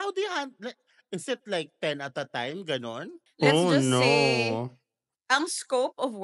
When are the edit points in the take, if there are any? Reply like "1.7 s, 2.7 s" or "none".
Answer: 3.2 s

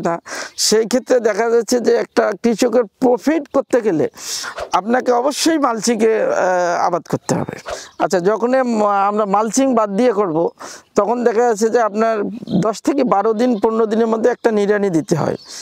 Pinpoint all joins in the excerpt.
7.6 s

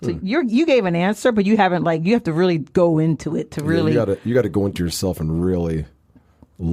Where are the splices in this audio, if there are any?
none

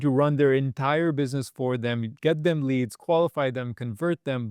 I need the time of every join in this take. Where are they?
none

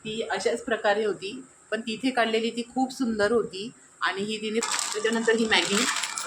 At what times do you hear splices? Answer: 4.6 s

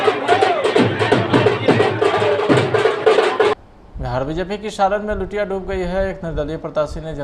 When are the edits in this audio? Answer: 3.8 s

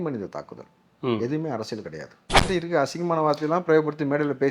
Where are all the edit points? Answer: 2.4 s

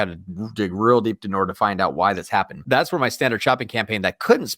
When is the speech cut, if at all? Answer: 2.6 s

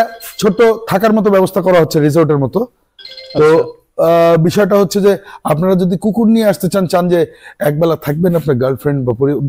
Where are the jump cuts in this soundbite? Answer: none

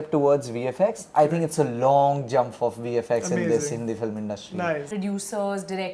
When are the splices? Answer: 4.9 s

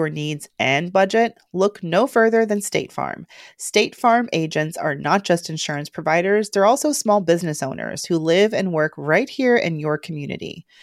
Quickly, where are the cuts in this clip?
none

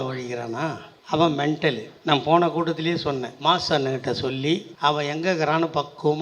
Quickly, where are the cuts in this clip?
0.9 s, 1.9 s, 3.3 s, 4.7 s

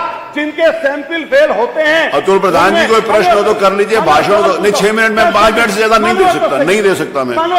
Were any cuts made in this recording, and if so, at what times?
none

